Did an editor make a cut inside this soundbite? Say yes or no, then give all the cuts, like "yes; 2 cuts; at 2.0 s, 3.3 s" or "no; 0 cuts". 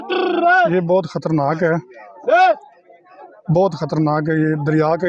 no; 0 cuts